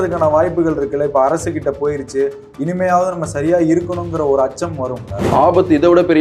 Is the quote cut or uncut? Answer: cut